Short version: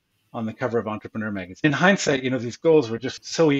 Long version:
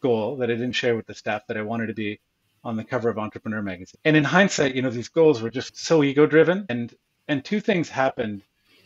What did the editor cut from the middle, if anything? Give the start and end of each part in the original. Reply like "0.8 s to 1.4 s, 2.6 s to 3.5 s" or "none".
4.0 s to 4.2 s

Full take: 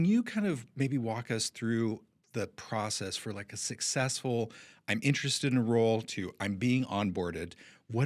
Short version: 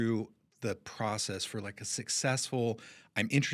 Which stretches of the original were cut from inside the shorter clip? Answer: none

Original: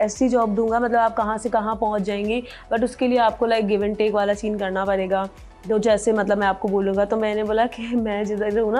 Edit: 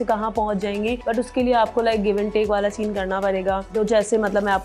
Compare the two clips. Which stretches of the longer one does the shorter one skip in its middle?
2.4 s to 2.6 s, 5.3 s to 5.6 s

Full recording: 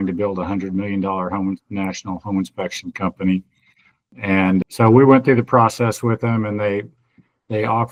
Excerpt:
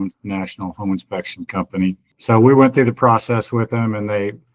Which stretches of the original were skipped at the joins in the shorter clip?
3.7 s to 4.7 s

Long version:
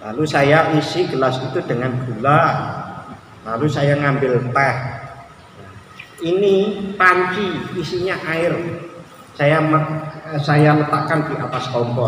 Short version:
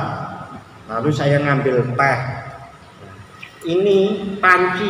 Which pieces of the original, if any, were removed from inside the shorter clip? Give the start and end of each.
none

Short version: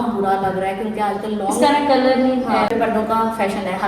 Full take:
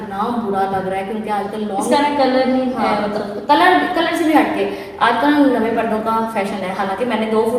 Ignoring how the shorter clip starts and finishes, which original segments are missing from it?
3.0 s to 5.7 s

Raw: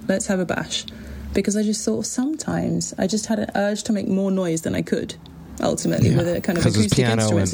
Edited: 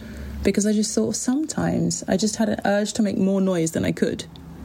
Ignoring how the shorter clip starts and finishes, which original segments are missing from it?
none

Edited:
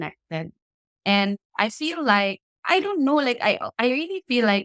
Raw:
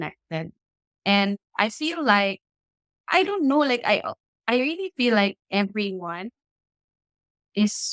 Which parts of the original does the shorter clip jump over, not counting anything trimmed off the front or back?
2.5 s to 2.9 s, 4.1 s to 4.4 s

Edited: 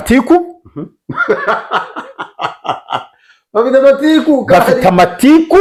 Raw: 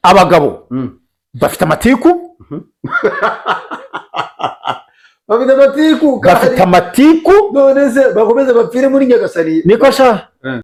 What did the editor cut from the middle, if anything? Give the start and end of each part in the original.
none

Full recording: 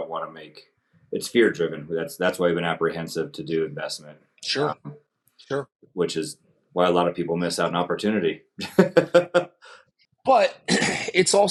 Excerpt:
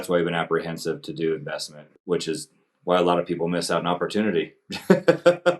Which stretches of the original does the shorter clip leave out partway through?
4.2 s to 5.8 s

